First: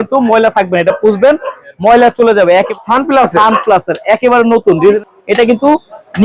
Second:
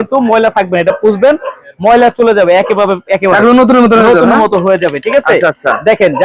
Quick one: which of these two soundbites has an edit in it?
first; 2 cuts; at 2.7 s, 5.0 s

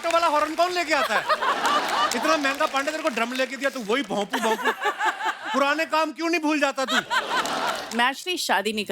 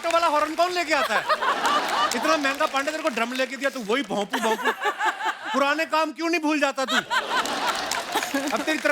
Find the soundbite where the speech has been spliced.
first; 1 cut; at 7.7 s

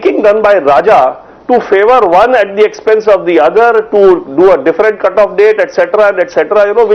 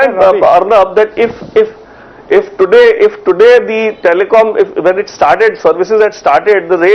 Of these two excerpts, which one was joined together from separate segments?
second; 1 cut; at 1.3 s

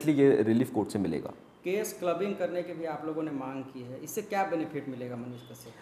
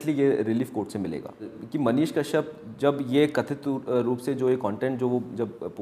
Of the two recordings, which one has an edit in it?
second; 1 cut; at 1.6 s

